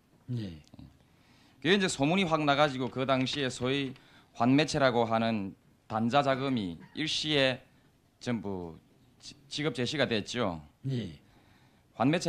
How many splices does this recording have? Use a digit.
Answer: 1